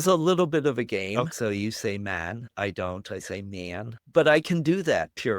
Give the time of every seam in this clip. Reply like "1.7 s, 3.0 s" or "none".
1.3 s, 2.5 s, 4.0 s

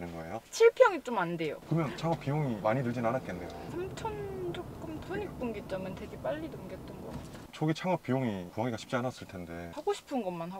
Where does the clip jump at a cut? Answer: 3.7 s, 5.0 s, 7.3 s, 9.7 s

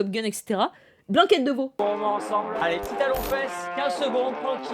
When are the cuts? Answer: 1.8 s

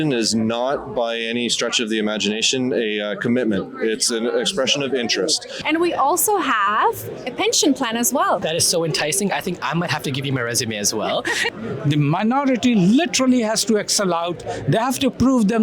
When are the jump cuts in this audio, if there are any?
5.5 s, 8.4 s, 11.5 s

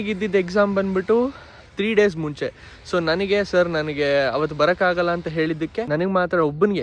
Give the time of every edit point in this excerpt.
5.8 s

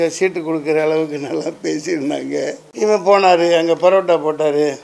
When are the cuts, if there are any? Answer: 2.6 s

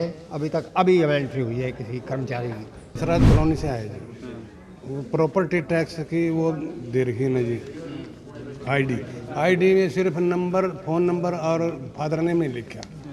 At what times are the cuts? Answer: 3.0 s

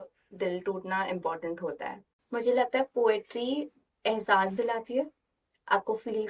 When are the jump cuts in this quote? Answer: 2.1 s

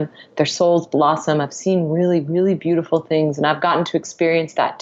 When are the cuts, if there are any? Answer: none

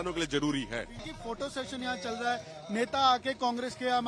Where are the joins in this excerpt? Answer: 1.1 s

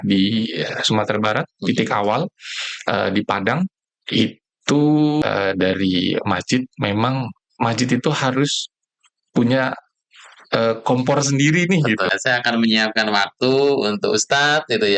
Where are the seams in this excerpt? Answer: 5.2 s, 12.2 s

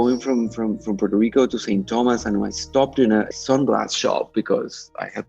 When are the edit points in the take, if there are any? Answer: 3.3 s

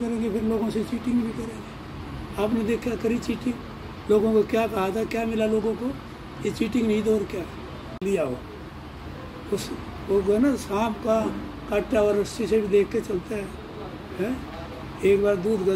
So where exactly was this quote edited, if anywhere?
8.0 s

